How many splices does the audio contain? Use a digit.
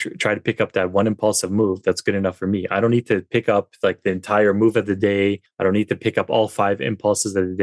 1